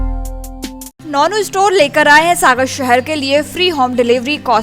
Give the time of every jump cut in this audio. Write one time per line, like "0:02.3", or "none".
0:00.9